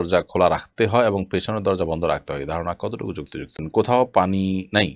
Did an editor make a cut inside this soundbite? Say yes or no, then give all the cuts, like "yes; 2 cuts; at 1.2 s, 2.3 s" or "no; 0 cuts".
yes; 1 cut; at 3.6 s